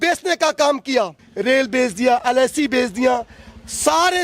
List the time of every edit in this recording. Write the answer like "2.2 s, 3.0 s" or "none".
1.2 s